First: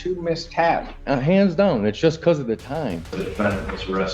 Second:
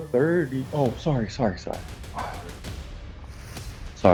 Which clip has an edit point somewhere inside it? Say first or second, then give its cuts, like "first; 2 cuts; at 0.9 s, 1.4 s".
first; 2 cuts; at 0.9 s, 3.2 s